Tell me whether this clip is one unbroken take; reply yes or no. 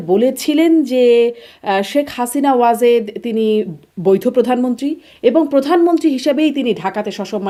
yes